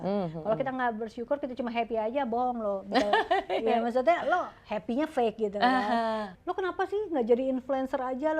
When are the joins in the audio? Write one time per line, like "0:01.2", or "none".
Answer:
0:06.3